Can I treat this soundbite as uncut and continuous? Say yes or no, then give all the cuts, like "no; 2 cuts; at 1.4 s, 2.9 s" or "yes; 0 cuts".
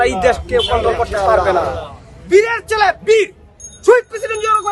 yes; 0 cuts